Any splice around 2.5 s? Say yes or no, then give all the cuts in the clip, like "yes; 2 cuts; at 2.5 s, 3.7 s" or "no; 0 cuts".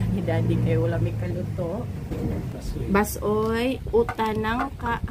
yes; 1 cut; at 2.5 s